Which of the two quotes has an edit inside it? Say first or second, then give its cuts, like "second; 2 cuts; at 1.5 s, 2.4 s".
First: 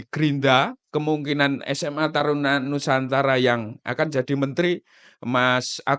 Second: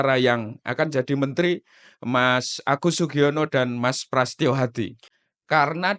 second; 1 cut; at 5.1 s